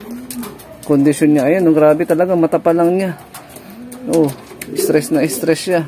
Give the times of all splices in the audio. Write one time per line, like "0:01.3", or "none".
none